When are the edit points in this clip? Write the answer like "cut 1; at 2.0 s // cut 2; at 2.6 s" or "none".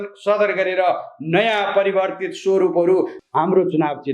cut 1; at 3.2 s